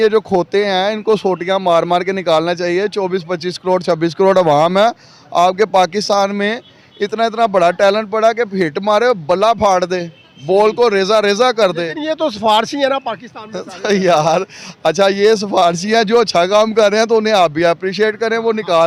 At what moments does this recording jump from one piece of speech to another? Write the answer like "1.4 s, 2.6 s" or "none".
none